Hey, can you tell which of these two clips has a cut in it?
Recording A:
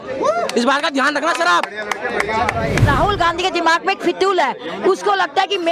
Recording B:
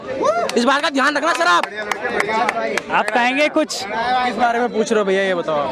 A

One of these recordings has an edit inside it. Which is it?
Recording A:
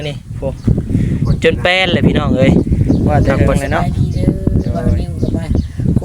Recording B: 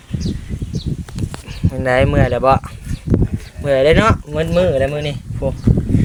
A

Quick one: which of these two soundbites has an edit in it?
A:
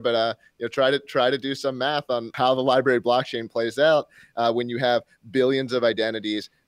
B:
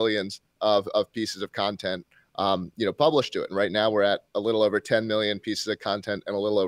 A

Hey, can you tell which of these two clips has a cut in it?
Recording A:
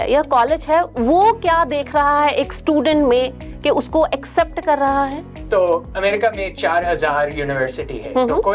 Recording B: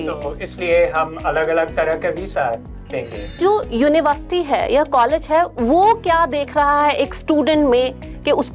B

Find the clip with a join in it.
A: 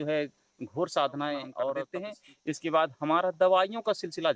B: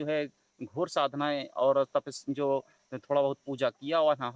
A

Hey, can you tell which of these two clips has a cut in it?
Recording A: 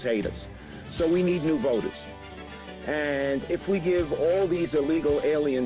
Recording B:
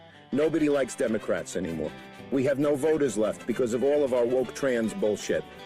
B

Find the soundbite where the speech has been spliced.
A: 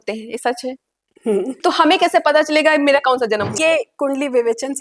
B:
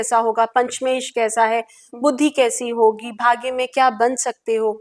A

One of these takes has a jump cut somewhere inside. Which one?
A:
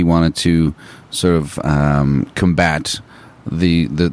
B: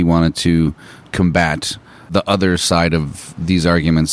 B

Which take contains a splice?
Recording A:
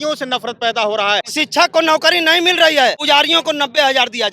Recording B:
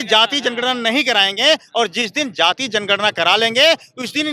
A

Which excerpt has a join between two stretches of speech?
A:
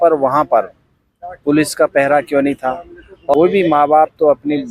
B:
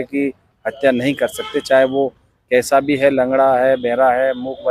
A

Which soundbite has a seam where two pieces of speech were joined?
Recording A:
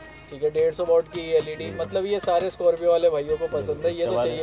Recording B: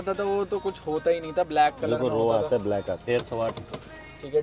B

